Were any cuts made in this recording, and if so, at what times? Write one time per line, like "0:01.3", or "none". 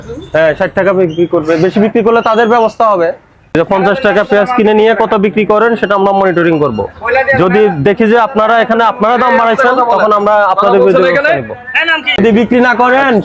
0:03.5
0:12.2